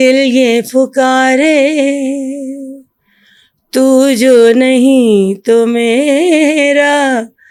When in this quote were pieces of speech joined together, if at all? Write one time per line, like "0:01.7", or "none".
none